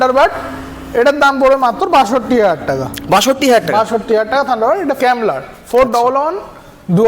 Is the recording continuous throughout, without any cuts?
no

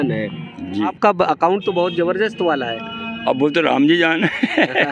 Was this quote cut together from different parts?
yes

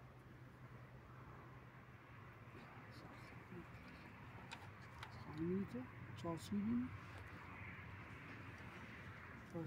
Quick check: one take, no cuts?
yes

